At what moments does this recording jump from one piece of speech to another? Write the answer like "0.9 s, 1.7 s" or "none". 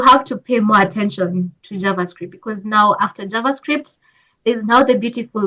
none